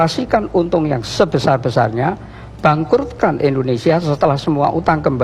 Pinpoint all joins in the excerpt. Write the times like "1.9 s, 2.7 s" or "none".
none